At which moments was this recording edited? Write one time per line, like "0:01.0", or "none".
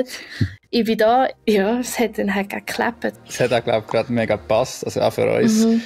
0:01.4
0:03.2